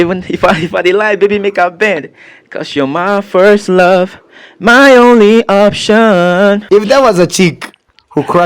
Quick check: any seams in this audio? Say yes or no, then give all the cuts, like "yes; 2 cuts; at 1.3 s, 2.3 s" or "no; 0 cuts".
yes; 1 cut; at 6.6 s